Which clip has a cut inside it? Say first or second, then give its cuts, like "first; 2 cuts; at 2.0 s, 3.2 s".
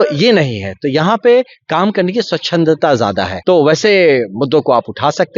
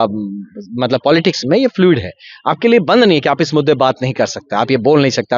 first; 1 cut; at 3.2 s